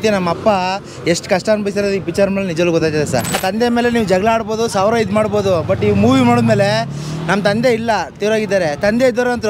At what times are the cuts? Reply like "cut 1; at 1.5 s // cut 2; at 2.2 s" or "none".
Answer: cut 1; at 3.4 s